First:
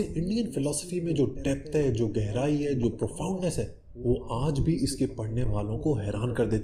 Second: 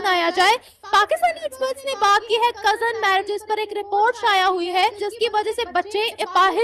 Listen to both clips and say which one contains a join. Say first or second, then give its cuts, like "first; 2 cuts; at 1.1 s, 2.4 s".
second; 1 cut; at 5.0 s